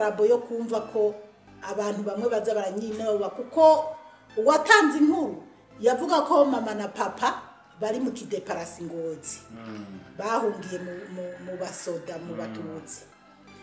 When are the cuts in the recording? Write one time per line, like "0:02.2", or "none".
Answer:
none